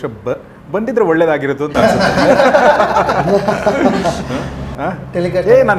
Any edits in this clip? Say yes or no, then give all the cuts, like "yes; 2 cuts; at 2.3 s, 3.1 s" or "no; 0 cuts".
yes; 1 cut; at 4.7 s